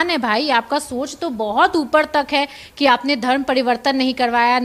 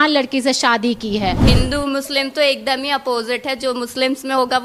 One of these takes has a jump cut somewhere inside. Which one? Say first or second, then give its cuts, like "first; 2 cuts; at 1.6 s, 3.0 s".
second; 1 cut; at 1.4 s